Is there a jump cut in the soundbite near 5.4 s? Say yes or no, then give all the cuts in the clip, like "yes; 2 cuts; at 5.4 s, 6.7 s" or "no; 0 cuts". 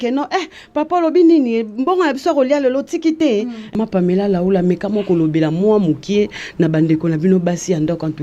no; 1 cut; at 3.8 s